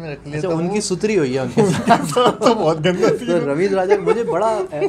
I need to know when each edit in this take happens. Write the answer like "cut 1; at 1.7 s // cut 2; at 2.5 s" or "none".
none